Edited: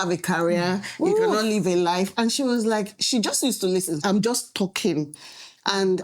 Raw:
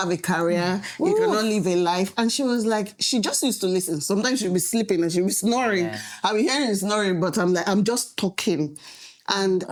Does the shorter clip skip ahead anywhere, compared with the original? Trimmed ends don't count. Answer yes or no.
yes